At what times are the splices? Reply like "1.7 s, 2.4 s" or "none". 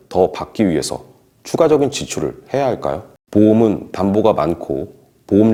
none